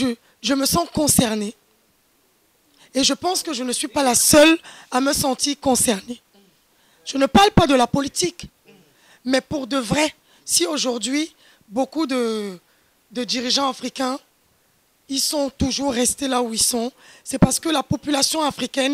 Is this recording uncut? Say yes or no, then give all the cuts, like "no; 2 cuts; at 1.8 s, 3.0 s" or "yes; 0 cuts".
yes; 0 cuts